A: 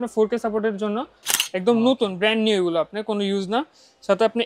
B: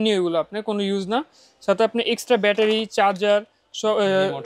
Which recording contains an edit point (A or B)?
A